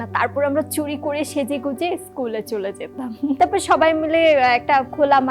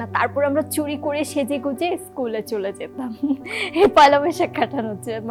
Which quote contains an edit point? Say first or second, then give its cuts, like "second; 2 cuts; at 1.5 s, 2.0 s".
first; 1 cut; at 3.4 s